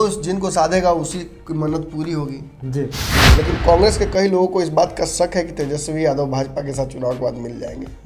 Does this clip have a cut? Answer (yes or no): yes